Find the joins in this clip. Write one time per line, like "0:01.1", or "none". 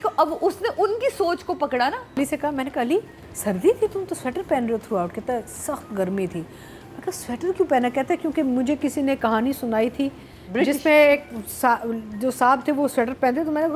0:02.2